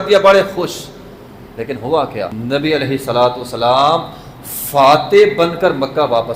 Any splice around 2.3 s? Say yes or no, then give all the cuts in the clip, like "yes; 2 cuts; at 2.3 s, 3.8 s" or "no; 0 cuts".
yes; 1 cut; at 2.3 s